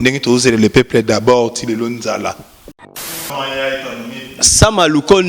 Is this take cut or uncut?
cut